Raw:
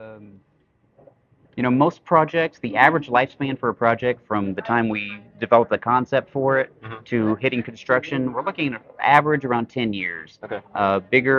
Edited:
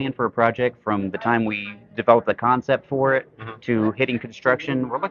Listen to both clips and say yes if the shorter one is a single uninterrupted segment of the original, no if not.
yes